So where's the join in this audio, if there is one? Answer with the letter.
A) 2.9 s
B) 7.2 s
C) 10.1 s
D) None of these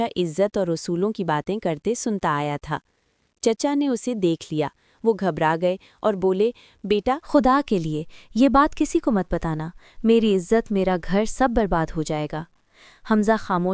B